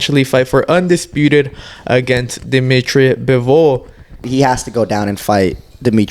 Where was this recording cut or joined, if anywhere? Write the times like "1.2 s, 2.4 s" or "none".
4.2 s